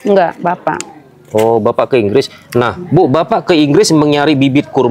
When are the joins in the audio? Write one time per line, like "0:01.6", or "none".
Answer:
none